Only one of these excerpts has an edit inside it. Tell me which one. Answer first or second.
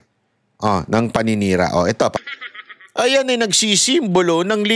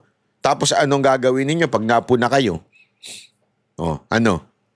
first